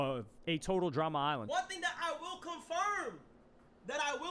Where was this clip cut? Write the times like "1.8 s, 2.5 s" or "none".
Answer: 1.4 s